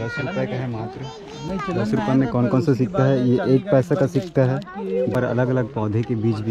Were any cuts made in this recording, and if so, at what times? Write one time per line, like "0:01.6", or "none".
0:05.1